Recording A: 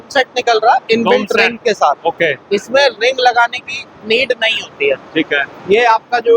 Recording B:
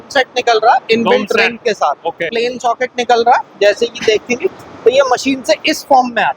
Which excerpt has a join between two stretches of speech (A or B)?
B